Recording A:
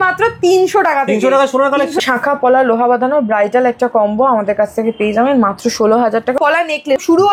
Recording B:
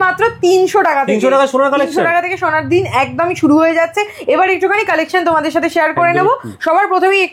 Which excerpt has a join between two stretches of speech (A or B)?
A